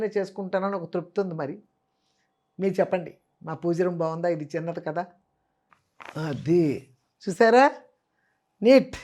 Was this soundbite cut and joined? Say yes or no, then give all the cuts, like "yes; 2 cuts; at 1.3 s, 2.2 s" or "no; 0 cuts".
yes; 1 cut; at 5.8 s